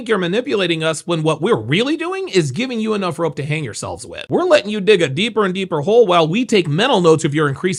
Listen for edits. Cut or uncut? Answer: uncut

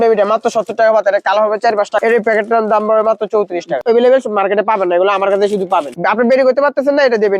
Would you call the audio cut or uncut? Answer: cut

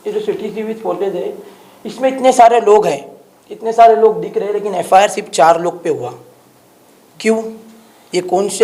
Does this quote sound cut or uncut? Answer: uncut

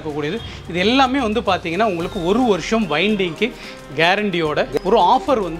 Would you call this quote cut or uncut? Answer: cut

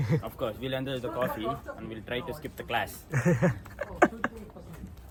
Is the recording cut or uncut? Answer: uncut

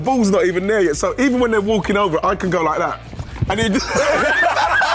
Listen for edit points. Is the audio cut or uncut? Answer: uncut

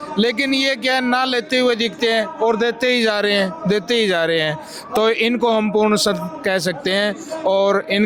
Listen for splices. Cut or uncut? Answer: uncut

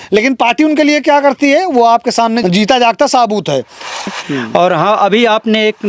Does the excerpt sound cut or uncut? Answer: cut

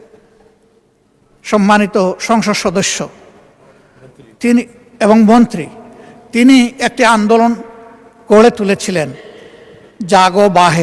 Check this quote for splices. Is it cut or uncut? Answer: uncut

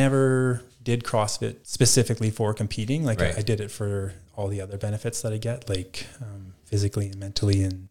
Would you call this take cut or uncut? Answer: cut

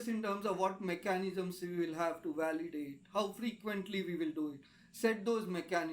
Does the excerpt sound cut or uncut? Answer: uncut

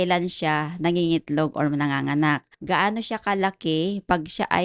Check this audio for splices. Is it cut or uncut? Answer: cut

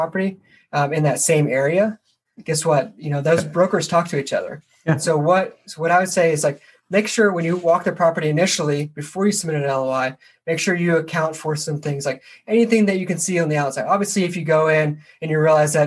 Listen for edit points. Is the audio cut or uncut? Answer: uncut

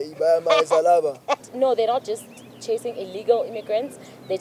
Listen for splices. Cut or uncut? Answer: cut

